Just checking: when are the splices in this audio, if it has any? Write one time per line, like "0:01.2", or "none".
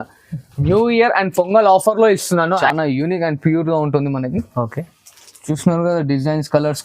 0:02.6